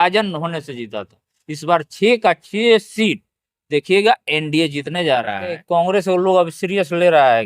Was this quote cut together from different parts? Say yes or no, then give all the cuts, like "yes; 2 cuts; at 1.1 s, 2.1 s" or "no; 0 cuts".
yes; 1 cut; at 5.6 s